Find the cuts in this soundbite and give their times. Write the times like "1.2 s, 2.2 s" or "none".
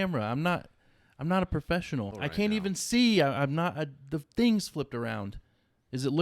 2.1 s